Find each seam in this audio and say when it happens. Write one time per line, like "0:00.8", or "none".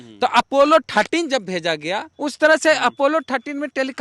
0:02.1